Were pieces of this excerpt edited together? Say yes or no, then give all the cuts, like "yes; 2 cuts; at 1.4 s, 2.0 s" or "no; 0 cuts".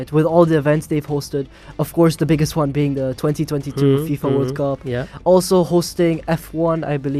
no; 0 cuts